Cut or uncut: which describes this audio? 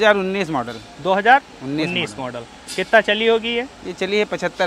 uncut